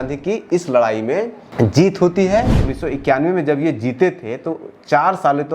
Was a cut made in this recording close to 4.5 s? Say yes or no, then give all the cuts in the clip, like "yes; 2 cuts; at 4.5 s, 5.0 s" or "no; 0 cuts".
no; 2 cuts; at 1.4 s, 2.5 s